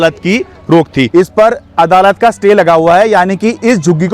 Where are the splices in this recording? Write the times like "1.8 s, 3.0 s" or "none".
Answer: 1.1 s